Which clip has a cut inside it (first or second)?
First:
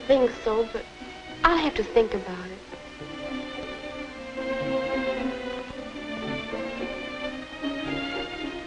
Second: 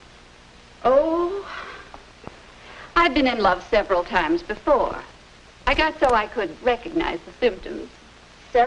second